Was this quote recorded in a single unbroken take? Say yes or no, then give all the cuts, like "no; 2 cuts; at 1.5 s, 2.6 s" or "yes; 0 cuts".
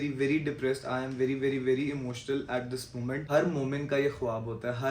no; 1 cut; at 3.2 s